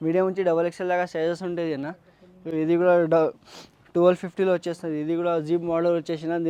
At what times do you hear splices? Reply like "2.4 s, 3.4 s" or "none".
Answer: none